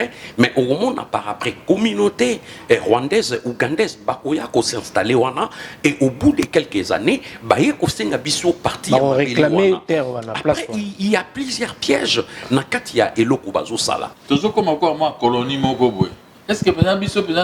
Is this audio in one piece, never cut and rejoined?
no; 2 cuts; at 14.1 s, 16.3 s

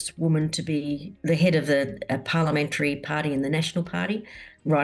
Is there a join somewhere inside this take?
yes; 1 cut; at 1.1 s

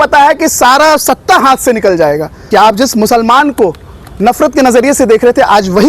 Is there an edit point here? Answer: yes; 1 cut; at 2.4 s

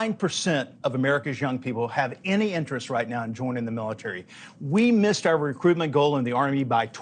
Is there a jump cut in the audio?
no; 0 cuts

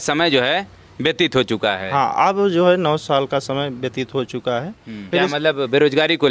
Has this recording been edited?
yes; 1 cut; at 4.9 s

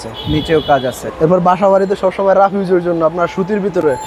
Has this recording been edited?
yes; 1 cut; at 1.0 s

